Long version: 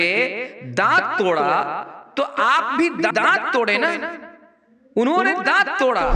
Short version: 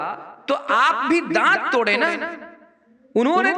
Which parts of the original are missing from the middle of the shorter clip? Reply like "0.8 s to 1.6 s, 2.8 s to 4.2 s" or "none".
3.1 s to 3.2 s